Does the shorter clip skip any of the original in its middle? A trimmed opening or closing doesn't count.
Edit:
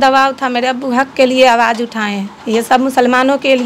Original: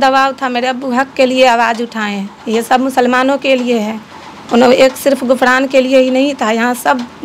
no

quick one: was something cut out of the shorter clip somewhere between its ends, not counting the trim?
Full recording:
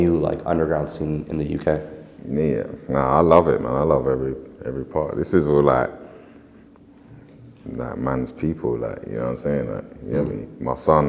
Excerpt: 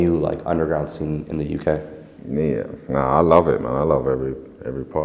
no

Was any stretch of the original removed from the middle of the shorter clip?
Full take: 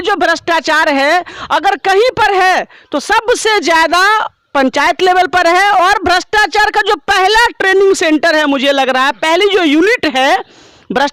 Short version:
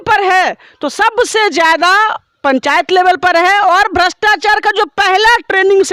no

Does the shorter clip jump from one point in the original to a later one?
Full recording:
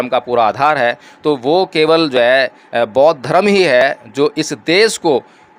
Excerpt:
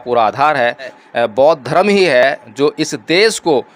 yes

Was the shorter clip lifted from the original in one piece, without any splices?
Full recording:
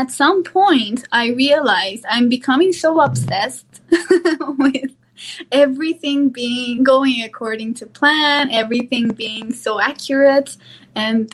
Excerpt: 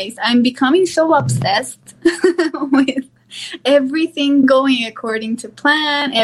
no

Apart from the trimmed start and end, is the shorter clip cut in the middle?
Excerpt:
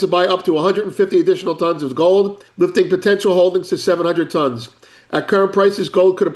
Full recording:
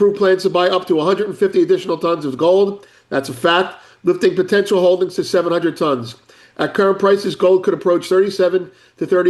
yes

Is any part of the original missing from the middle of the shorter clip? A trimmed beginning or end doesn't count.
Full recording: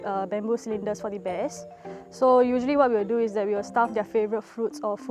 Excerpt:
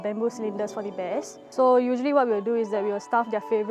yes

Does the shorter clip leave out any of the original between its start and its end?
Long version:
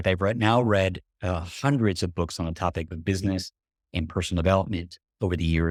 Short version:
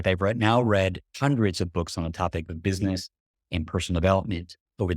yes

